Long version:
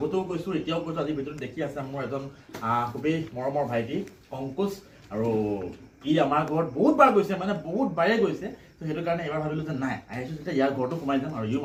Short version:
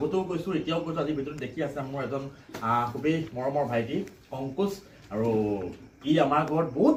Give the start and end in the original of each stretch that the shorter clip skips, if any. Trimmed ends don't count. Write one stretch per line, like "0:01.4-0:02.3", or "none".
none